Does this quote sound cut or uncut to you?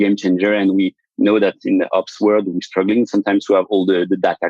cut